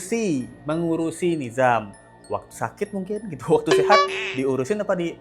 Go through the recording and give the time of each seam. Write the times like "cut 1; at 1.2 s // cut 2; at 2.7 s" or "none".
none